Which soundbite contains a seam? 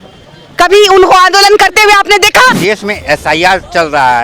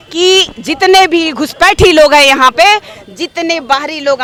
first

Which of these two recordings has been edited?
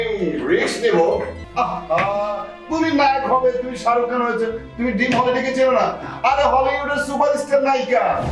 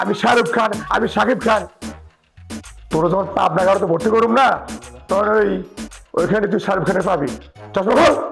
first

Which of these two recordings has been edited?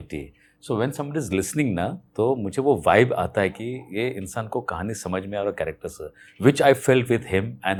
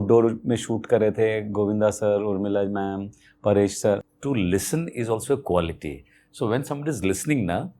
second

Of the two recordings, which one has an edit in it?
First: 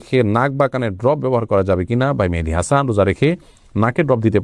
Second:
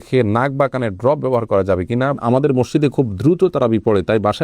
second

